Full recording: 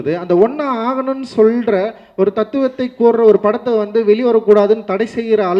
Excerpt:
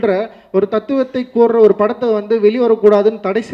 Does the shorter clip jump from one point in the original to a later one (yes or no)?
no